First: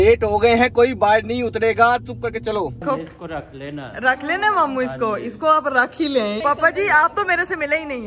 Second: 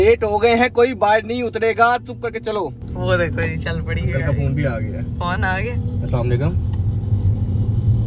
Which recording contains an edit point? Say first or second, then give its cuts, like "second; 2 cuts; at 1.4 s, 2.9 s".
first; 2 cuts; at 2.8 s, 6.4 s